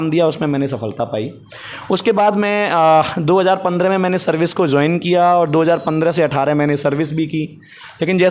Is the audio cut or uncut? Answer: uncut